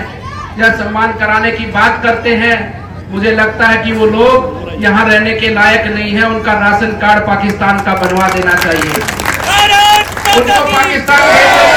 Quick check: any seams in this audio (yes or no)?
no